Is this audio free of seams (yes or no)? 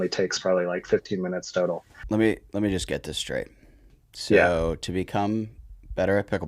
no